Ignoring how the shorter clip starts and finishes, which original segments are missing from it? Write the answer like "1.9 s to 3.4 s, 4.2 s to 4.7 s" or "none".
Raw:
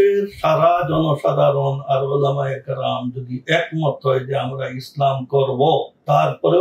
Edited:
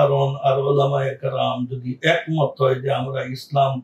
none